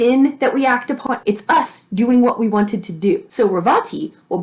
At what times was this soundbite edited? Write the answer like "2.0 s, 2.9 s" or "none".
1.0 s, 3.3 s